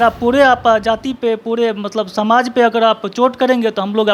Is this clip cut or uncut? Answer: uncut